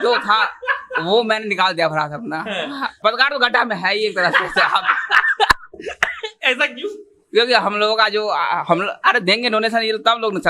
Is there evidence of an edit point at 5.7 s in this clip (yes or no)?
no